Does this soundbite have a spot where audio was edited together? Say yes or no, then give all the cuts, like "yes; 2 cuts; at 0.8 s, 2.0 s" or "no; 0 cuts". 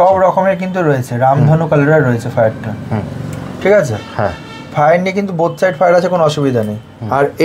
no; 0 cuts